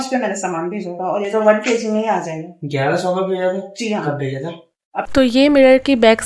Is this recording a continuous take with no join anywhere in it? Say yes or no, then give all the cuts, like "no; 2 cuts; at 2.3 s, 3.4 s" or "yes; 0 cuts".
no; 1 cut; at 4.9 s